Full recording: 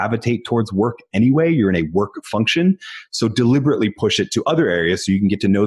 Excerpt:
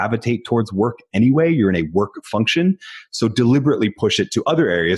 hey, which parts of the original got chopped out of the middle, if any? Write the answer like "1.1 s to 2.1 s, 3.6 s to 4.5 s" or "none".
none